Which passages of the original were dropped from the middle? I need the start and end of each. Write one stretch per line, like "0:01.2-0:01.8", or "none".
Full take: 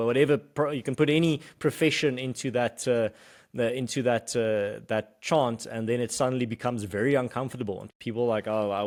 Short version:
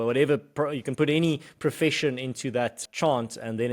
0:02.8-0:05.1